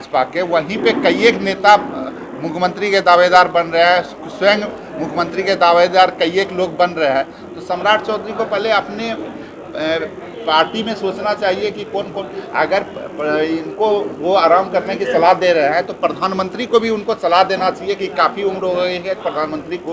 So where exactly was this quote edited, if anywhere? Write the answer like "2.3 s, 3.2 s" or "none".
none